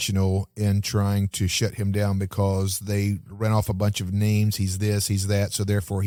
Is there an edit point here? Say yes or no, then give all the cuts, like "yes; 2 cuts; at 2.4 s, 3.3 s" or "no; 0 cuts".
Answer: no; 0 cuts